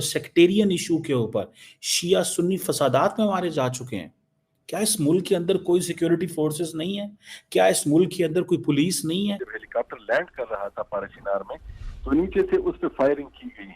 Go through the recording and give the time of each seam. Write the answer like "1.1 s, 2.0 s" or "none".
9.4 s